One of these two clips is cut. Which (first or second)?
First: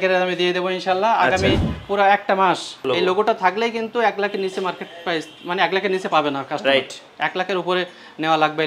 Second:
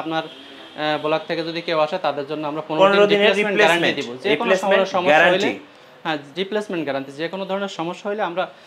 first